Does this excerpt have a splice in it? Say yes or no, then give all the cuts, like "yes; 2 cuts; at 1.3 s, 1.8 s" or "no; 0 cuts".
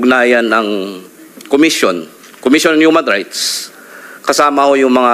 no; 0 cuts